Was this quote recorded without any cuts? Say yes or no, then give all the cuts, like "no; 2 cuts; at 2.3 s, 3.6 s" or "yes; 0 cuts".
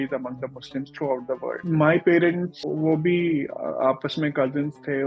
no; 2 cuts; at 1.6 s, 2.6 s